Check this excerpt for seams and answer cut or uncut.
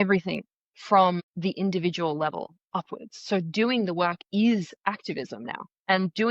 cut